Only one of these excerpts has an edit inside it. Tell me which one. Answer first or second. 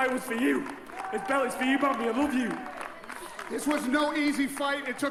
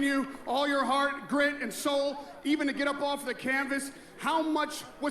second